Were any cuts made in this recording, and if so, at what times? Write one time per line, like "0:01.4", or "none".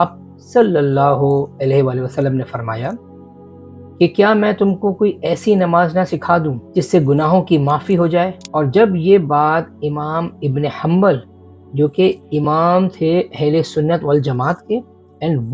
0:06.6
0:08.4